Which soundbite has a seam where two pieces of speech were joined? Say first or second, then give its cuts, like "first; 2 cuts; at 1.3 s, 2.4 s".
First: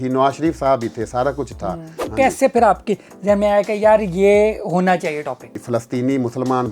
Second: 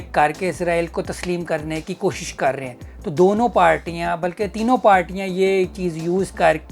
first; 2 cuts; at 2.0 s, 5.5 s